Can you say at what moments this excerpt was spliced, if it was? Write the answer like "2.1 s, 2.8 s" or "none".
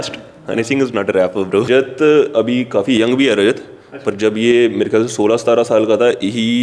1.6 s